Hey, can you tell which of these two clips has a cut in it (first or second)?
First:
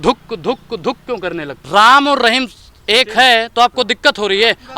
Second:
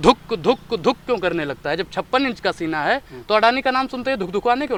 first